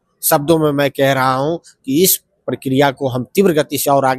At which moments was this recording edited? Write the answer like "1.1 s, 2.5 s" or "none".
none